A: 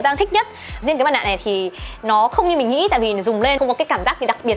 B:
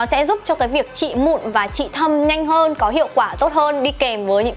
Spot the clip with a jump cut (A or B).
A